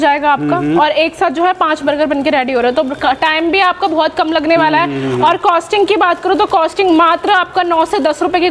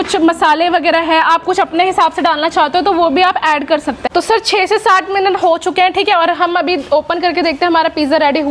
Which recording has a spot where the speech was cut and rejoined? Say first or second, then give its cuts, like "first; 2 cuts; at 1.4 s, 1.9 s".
second; 1 cut; at 4.0 s